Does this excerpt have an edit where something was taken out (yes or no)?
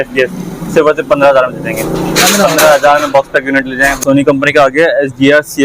yes